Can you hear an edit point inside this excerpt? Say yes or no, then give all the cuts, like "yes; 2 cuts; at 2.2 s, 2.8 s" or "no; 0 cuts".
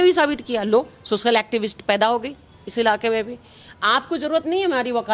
no; 0 cuts